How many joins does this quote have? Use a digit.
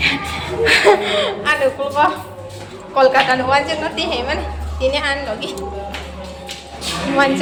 0